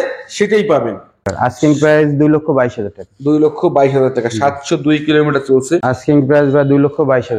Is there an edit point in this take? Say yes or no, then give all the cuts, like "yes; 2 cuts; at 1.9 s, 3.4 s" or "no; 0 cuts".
yes; 2 cuts; at 1.2 s, 5.8 s